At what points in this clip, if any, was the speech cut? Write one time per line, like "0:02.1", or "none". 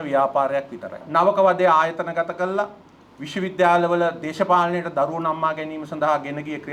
0:01.0

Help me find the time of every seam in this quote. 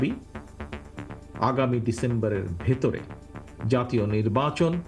none

